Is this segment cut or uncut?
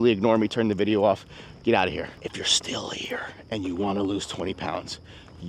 cut